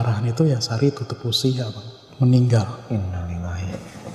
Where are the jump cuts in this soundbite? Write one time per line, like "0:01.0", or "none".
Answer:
none